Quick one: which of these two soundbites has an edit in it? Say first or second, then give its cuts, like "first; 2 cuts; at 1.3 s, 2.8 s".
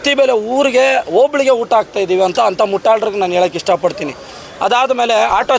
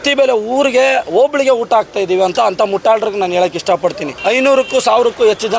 second; 1 cut; at 4.1 s